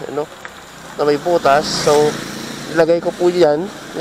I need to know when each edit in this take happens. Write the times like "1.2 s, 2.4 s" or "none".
none